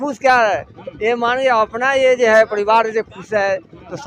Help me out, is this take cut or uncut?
uncut